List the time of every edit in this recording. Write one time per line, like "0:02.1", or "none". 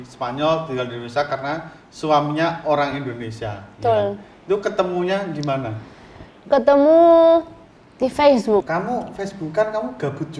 0:08.7